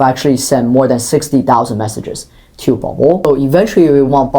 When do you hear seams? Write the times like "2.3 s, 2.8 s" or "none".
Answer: 3.3 s